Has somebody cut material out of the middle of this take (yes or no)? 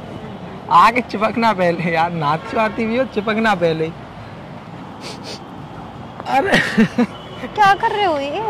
yes